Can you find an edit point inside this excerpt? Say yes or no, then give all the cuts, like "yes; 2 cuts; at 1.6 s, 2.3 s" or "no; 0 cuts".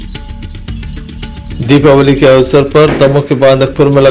yes; 1 cut; at 1.5 s